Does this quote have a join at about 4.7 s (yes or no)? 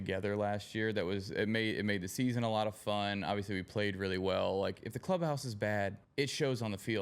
yes